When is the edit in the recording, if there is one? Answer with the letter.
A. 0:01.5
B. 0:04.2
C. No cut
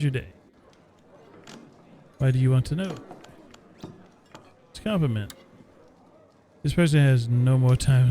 B